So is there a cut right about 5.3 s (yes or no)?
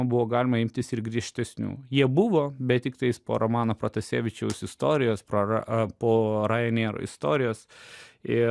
no